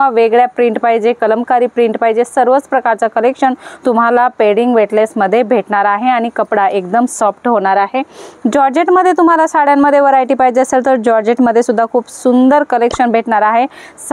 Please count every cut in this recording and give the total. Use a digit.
0